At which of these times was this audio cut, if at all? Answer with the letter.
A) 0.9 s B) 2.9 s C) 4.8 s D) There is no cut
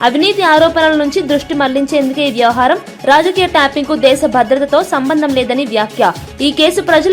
D